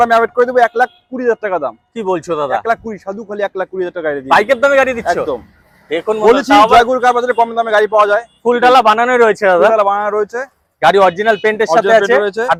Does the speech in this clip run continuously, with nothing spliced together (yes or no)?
yes